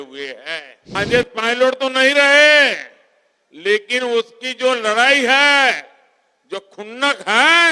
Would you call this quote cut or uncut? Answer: cut